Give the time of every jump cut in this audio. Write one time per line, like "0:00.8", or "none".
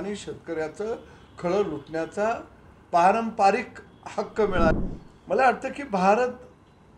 0:04.7

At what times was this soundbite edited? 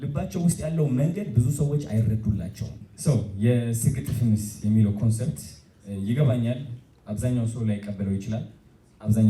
0:02.9

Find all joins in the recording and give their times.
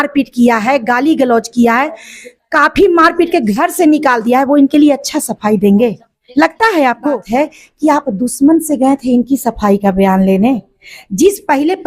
0:07.2

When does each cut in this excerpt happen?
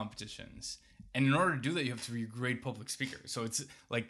none

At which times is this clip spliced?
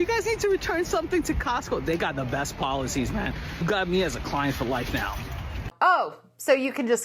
0:03.6
0:05.7

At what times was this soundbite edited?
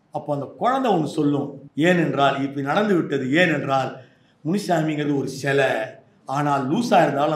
0:01.6

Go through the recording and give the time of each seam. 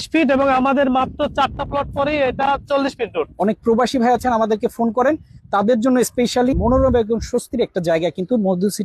0:03.3
0:06.5

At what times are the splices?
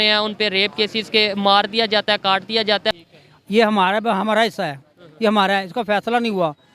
0:02.9

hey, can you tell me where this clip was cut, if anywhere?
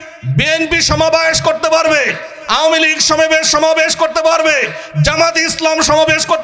none

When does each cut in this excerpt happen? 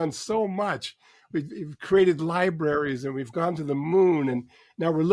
none

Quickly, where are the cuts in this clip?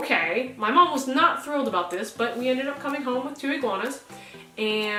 none

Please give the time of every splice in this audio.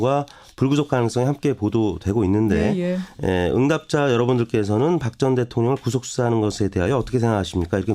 0:05.1

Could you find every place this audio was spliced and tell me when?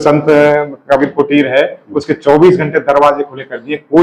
none

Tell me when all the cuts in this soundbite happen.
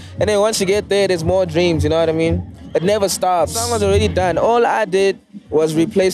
0:02.5
0:03.6

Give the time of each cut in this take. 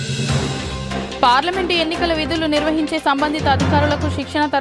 0:01.2

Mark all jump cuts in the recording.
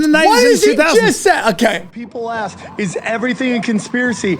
0:01.9

